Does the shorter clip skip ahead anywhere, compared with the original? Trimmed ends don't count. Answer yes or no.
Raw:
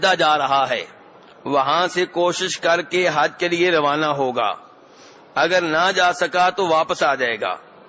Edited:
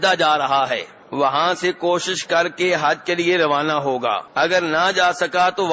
yes